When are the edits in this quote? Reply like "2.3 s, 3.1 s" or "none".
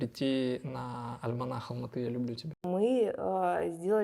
2.7 s